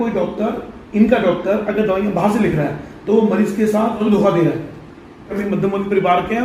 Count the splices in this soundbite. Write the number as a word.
two